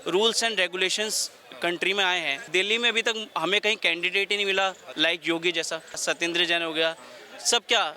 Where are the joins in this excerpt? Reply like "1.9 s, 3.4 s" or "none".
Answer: 2.4 s, 6.0 s